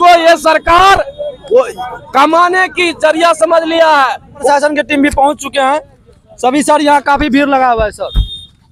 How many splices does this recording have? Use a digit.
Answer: 1